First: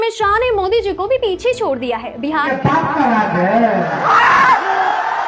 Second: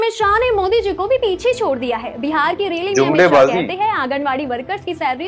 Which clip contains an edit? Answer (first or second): first